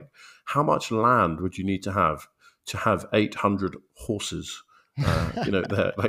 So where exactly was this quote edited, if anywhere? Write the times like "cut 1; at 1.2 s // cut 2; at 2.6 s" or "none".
none